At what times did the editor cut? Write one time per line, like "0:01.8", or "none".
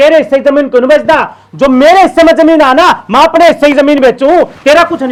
none